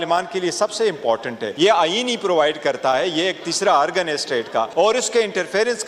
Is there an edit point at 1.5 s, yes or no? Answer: yes